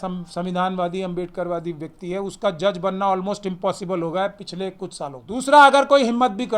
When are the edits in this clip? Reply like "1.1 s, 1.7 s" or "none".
5.2 s